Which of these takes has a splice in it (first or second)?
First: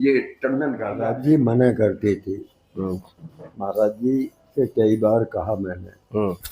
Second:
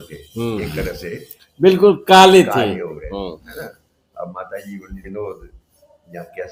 first